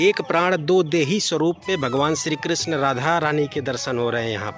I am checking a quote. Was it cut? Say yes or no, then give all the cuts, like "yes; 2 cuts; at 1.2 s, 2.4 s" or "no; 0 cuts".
no; 0 cuts